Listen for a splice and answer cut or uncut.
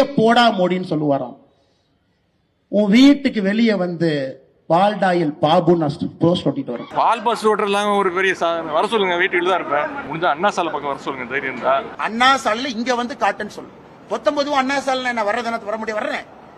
cut